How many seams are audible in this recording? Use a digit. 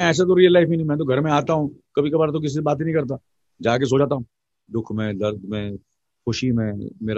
1